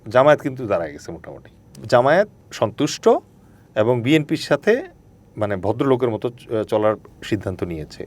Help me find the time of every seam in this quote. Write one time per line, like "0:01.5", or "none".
0:01.7
0:02.4